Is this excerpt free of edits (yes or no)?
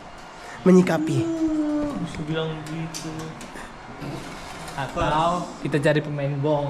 yes